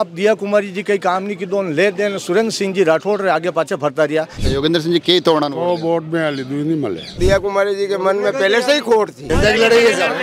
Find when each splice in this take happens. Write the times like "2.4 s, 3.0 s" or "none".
4.4 s, 7.1 s, 9.2 s